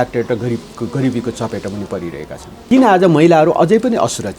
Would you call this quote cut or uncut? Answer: cut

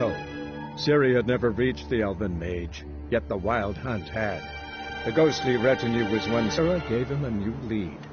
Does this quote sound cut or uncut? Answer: cut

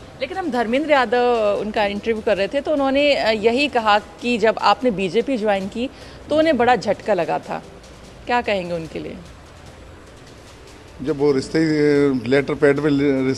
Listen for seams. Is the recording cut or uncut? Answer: uncut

